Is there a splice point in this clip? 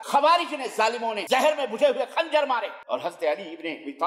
yes; 2 cuts; at 1.2 s, 2.8 s

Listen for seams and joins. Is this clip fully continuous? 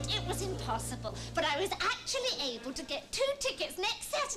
no; 1 cut; at 1.8 s

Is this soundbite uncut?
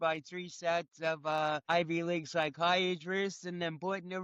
no; 1 cut; at 1.6 s

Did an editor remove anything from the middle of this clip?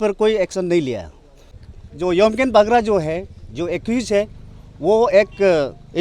yes; 1 cut; at 1.7 s

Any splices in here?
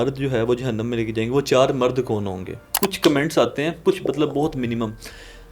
yes; 1 cut; at 2.6 s

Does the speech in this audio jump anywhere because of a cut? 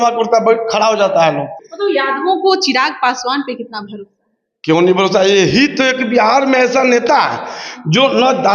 yes; 1 cut; at 1.6 s

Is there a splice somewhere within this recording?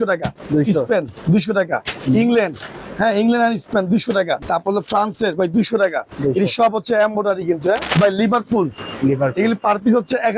yes; 2 cuts; at 4.4 s, 7.9 s

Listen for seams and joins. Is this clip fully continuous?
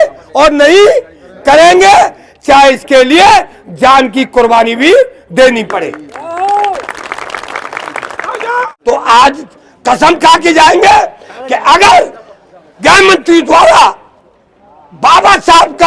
no; 1 cut; at 8.7 s

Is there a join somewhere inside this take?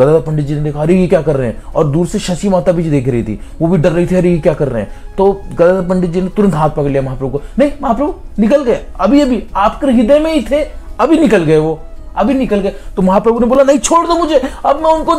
no; 0 cuts

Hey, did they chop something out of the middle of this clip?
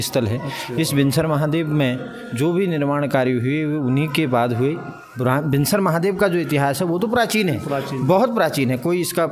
no; 0 cuts

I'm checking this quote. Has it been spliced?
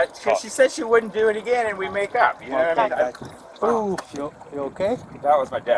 no; 0 cuts

